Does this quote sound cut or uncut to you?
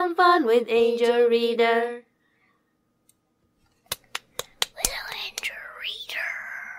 cut